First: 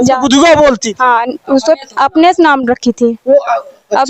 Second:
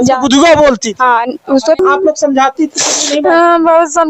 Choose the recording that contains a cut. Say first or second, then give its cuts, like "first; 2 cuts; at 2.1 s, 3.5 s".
second; 1 cut; at 1.8 s